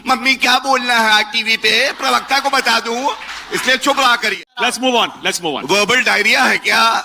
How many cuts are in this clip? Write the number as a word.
two